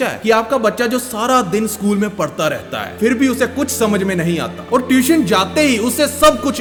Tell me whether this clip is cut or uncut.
uncut